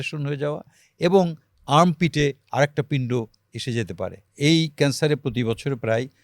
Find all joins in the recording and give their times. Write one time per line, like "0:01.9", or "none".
0:04.2